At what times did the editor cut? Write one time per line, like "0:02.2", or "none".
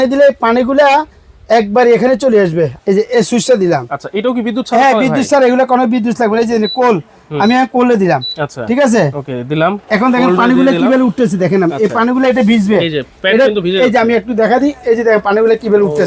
0:02.8